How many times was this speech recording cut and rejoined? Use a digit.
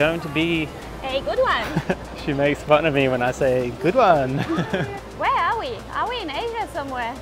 2